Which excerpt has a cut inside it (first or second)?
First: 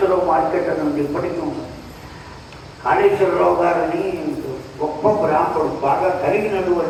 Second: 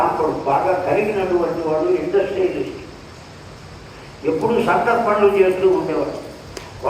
second